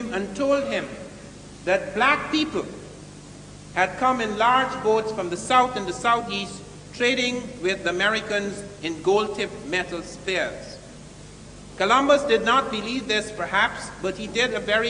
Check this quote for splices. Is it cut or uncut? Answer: uncut